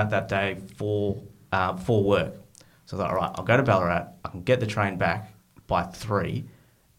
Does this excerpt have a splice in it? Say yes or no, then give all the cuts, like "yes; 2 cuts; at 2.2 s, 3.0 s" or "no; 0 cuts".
no; 0 cuts